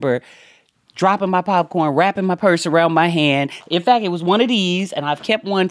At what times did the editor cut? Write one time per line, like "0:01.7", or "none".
none